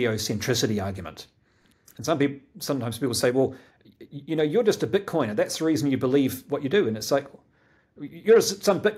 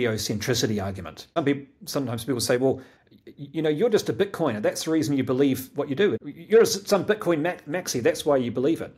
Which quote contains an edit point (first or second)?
second